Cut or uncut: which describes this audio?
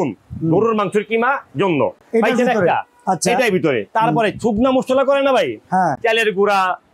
uncut